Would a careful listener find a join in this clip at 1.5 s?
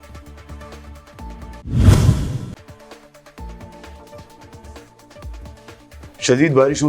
yes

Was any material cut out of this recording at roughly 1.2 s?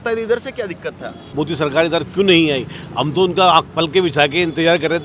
yes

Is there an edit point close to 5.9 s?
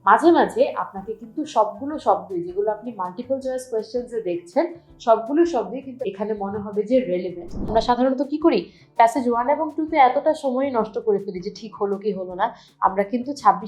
yes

